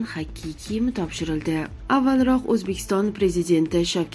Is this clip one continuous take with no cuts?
yes; 0 cuts

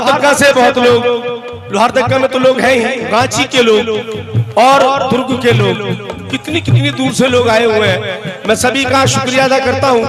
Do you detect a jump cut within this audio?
no; 0 cuts

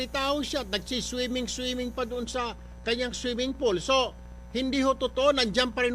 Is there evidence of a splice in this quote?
yes; 1 cut; at 5.0 s

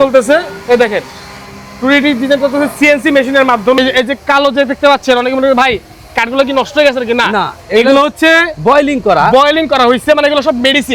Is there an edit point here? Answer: yes; 1 cut; at 3.8 s

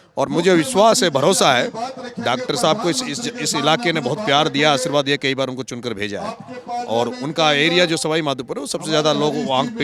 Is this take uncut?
yes; 0 cuts

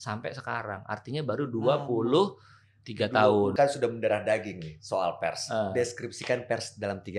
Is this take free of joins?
no; 1 cut; at 3.5 s

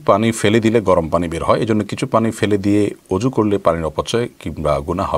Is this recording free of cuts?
yes; 0 cuts

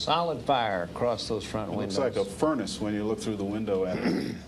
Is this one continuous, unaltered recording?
yes; 0 cuts

